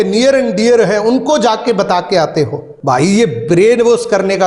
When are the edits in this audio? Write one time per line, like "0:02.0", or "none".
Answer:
0:02.7